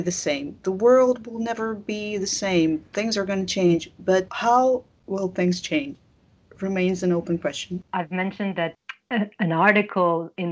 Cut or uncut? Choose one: uncut